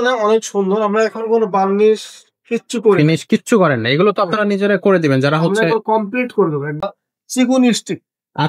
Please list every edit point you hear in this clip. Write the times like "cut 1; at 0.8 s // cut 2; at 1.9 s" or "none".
cut 1; at 6.9 s